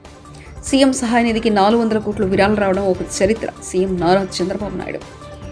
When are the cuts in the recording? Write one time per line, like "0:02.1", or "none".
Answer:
none

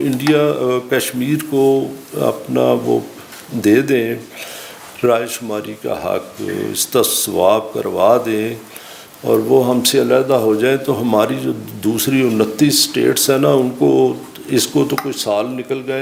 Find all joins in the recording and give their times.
none

